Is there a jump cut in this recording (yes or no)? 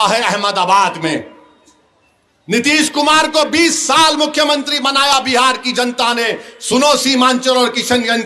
no